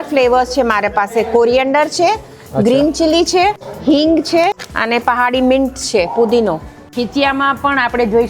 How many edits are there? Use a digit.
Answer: 3